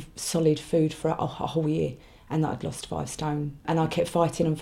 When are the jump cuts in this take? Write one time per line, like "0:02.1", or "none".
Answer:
0:03.6